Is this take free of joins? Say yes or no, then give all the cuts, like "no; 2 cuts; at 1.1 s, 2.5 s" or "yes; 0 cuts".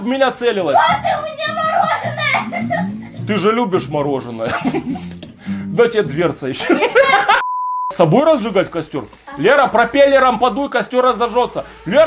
no; 1 cut; at 7.9 s